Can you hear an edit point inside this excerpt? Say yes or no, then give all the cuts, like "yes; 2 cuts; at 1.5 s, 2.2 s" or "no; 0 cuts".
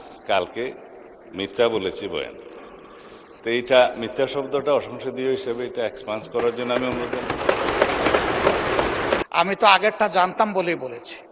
yes; 1 cut; at 9.2 s